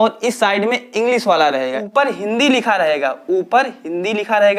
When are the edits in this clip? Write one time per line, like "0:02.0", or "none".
0:01.9